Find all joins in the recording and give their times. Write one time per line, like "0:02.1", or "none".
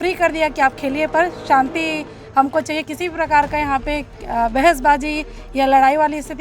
none